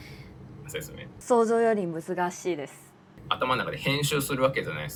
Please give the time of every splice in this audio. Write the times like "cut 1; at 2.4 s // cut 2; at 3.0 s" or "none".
none

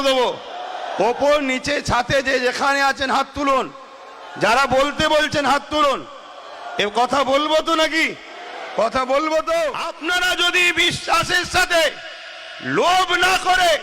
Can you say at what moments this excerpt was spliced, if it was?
cut 1; at 9.9 s

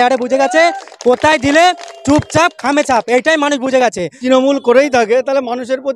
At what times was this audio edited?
cut 1; at 4.2 s

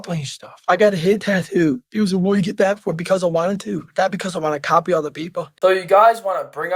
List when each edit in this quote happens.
cut 1; at 5.5 s

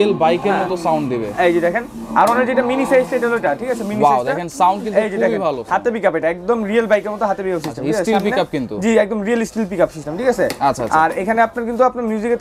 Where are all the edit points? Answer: none

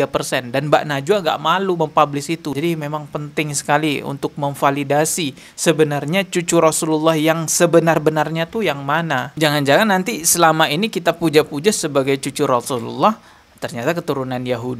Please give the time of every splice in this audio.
cut 1; at 2.5 s

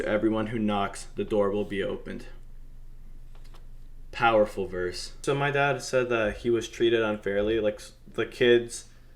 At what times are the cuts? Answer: cut 1; at 5.2 s

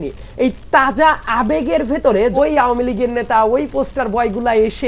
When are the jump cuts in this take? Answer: cut 1; at 2.3 s

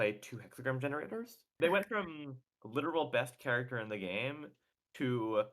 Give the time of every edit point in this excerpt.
cut 1; at 1.4 s

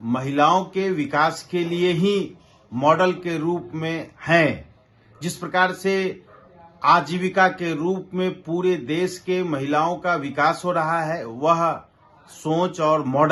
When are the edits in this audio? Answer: none

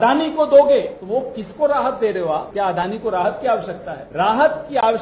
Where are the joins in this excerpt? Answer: cut 1; at 1.0 s // cut 2; at 2.5 s // cut 3; at 4.0 s

